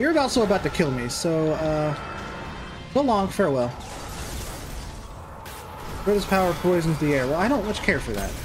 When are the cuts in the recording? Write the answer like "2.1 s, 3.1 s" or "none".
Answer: 5.5 s